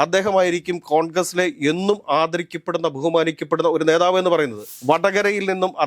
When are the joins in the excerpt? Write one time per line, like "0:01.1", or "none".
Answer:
0:04.7